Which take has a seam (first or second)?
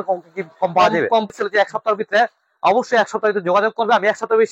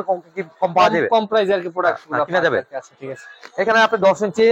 first